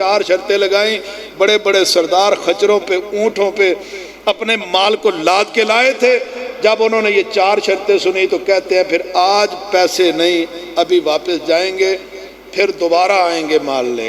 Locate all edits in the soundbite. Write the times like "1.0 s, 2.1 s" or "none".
none